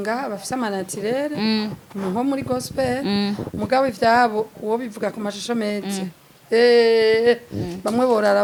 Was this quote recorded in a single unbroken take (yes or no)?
yes